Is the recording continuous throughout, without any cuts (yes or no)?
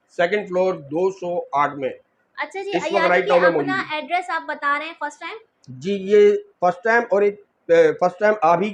yes